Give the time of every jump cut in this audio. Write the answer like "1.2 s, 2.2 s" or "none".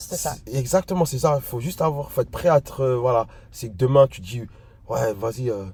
none

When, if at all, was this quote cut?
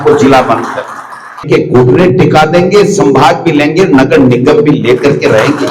1.4 s

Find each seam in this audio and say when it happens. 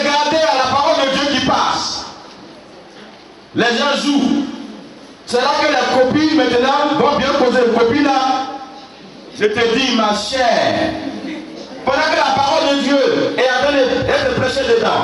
none

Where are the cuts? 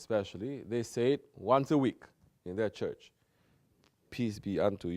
2.9 s

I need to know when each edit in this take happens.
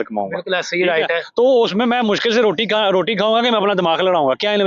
none

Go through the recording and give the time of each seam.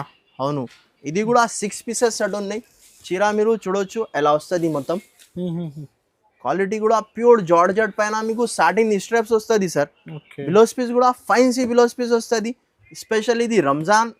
none

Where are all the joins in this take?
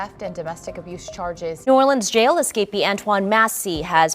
1.6 s

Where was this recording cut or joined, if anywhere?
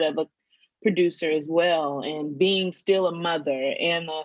none

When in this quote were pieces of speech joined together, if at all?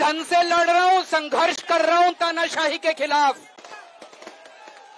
none

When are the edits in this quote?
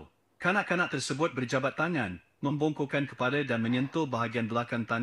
none

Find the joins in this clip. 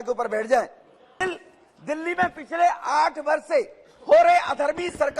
1.2 s

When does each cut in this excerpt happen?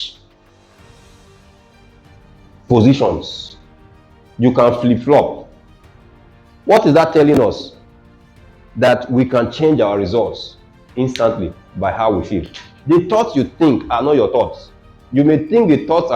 12.7 s

